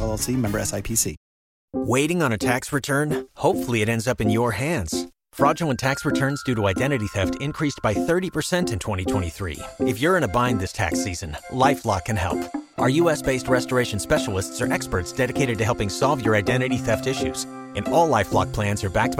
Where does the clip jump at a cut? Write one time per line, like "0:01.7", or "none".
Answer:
0:01.7

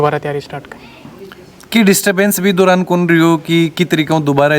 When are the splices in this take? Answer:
none

